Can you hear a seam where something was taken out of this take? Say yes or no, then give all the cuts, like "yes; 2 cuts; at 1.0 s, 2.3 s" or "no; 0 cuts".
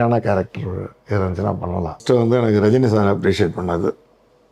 yes; 1 cut; at 2.0 s